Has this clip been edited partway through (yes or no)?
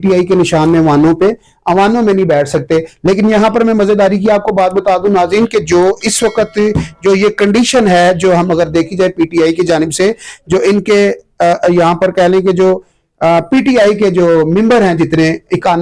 no